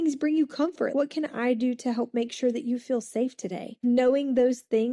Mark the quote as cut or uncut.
cut